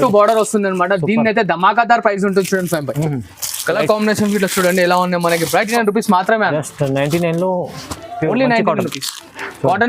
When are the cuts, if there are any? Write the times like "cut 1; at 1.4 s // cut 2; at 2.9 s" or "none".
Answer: cut 1; at 5.7 s